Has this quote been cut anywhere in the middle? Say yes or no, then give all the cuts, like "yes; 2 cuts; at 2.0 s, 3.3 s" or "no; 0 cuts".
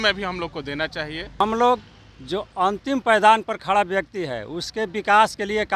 yes; 1 cut; at 1.4 s